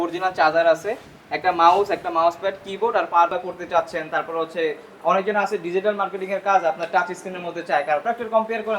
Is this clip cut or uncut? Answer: cut